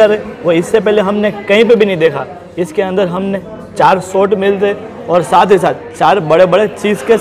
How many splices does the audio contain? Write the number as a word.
zero